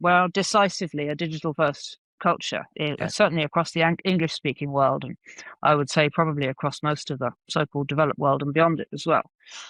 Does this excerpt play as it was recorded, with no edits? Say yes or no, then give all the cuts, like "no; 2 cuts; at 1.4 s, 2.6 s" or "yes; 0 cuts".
yes; 0 cuts